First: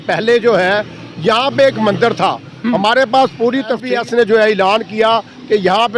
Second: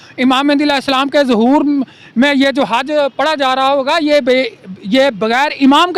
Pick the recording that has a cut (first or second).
first